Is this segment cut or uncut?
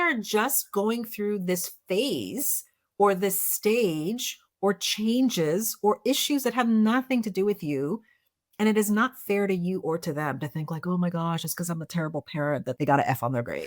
cut